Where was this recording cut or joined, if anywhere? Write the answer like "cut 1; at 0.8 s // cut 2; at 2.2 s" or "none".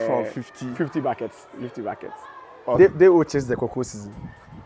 cut 1; at 2.8 s